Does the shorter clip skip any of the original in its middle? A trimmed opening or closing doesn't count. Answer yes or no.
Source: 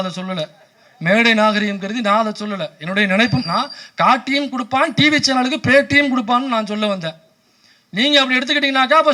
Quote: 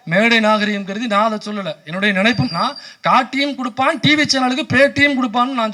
no